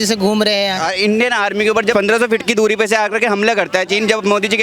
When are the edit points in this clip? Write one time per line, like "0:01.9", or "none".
0:00.8
0:01.9

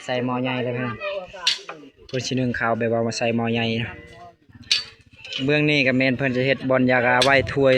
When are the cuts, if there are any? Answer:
none

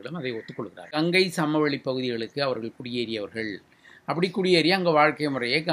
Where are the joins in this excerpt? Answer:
0:00.9

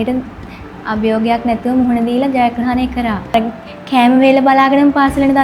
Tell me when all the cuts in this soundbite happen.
0:03.3

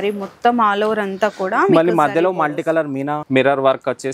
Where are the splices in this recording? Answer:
0:03.2

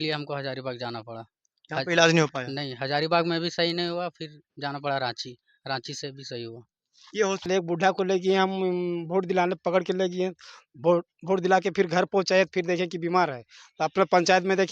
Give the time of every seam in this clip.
0:07.5

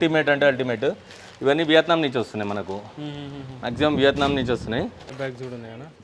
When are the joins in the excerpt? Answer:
0:05.1

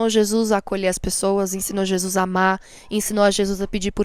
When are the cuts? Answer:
none

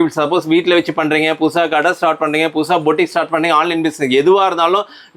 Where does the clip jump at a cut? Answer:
none

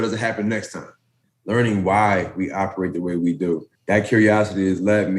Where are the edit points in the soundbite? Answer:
0:01.3
0:03.7

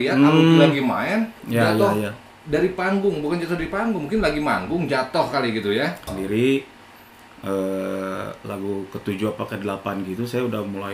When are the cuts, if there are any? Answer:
0:01.4
0:06.1

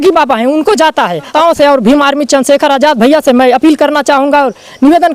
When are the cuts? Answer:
0:01.3

